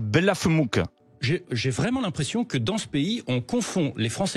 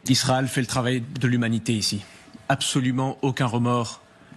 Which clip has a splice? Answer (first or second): first